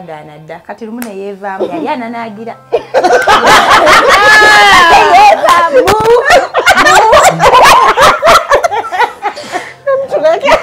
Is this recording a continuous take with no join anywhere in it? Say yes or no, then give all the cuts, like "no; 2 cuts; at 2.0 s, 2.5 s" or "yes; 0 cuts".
no; 1 cut; at 5.7 s